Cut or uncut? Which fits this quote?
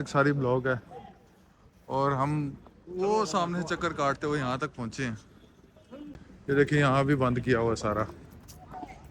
uncut